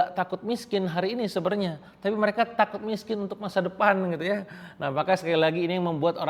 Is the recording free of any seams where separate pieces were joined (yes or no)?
yes